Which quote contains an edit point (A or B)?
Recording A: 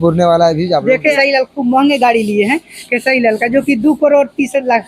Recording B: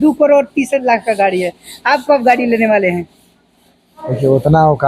A